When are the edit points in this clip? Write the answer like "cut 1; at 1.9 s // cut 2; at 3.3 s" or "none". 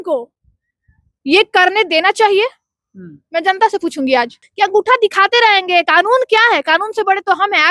cut 1; at 4.4 s